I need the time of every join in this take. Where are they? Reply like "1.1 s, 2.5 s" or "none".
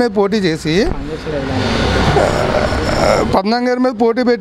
none